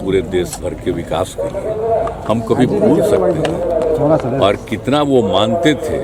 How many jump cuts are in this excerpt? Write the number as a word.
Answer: zero